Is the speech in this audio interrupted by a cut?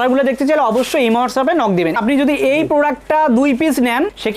yes; 1 cut; at 2.0 s

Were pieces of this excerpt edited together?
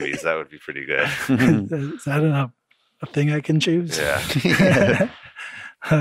no; 0 cuts

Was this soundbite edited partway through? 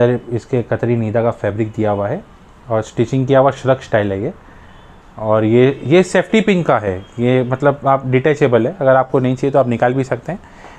no; 0 cuts

